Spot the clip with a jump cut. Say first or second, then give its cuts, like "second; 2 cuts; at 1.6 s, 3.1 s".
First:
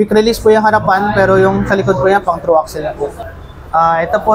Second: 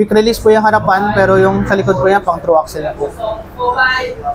first; 1 cut; at 3.2 s